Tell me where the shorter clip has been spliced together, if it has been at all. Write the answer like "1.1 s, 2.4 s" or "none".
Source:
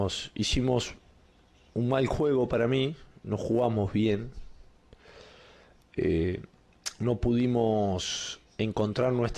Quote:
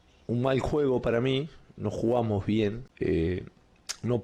2.9 s